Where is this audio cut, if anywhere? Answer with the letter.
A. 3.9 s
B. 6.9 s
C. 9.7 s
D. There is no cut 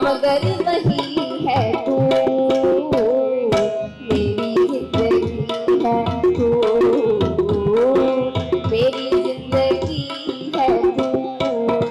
D